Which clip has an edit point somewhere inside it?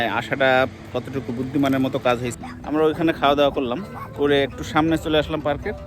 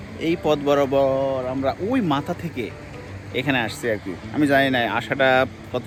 first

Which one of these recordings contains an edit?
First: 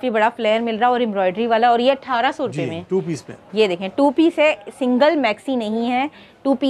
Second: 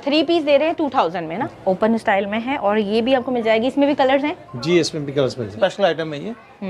second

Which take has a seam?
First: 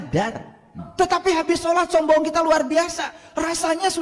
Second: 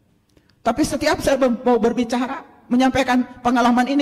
first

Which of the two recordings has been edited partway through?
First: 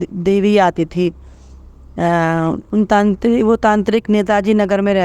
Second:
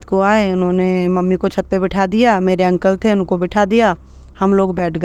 first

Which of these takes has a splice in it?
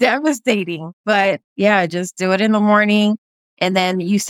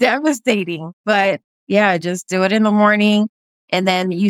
first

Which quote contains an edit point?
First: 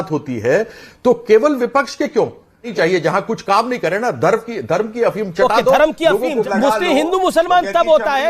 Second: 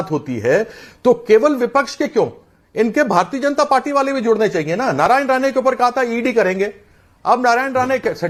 first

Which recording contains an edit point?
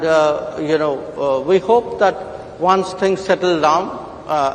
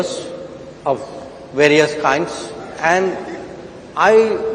second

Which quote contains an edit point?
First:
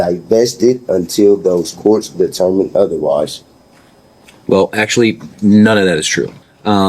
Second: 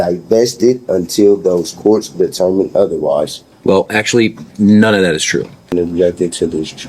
second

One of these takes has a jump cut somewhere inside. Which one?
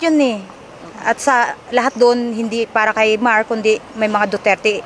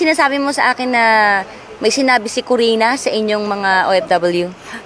first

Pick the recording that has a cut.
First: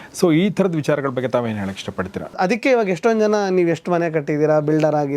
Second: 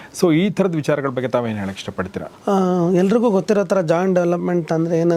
first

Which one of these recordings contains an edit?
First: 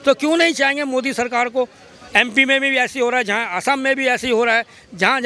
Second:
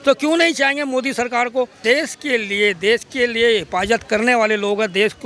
second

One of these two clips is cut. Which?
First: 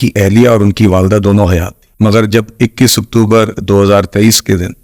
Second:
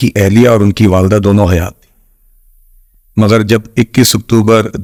first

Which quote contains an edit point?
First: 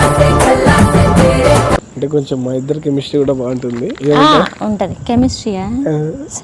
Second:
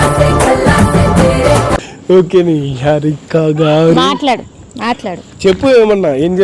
first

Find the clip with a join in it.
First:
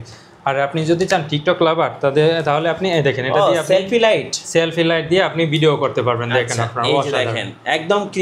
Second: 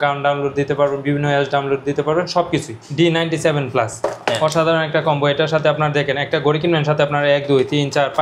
second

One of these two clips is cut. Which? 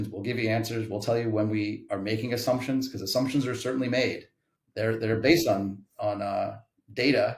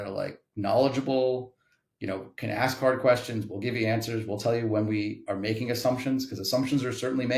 first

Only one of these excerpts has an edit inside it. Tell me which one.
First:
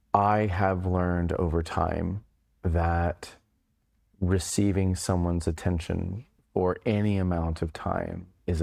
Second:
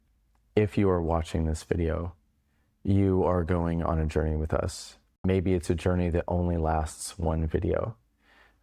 second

